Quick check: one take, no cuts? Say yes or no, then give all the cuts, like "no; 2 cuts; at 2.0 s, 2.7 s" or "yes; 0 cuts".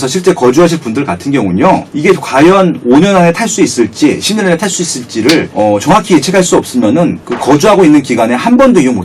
no; 3 cuts; at 1.9 s, 5.5 s, 7.3 s